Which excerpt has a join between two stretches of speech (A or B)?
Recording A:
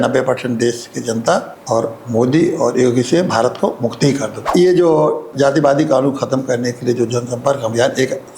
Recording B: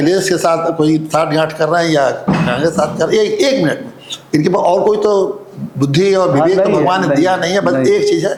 A